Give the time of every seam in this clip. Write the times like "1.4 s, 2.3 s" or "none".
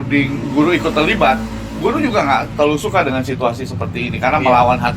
none